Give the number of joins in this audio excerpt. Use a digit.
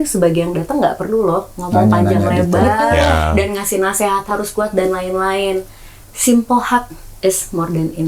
0